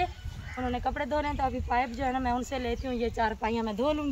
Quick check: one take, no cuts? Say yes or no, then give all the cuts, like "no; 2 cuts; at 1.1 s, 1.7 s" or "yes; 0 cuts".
yes; 0 cuts